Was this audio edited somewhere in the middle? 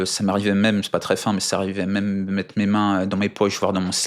no; 0 cuts

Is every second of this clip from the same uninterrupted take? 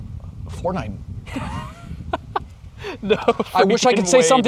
yes; 0 cuts

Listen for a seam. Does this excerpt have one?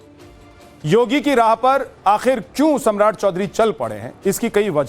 yes; 1 cut; at 3.5 s

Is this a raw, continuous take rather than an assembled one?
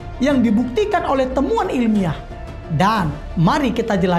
no; 1 cut; at 2.6 s

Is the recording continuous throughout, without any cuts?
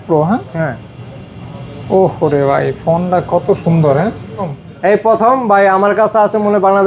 no; 1 cut; at 4.5 s

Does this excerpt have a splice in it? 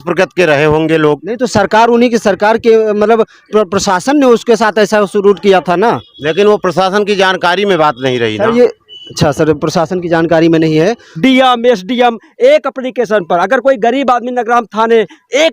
yes; 2 cuts; at 11.2 s, 12.8 s

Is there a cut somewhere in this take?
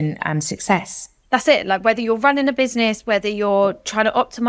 no; 0 cuts

